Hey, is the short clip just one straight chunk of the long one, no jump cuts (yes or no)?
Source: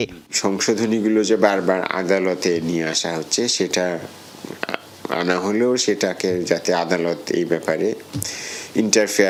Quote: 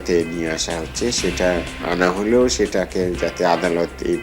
no